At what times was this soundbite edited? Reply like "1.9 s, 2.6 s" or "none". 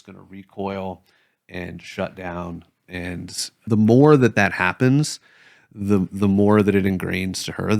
3.7 s